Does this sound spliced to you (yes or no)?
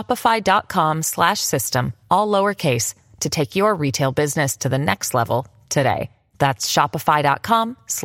no